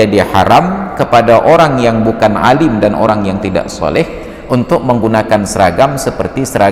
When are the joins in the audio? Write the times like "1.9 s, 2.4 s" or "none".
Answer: none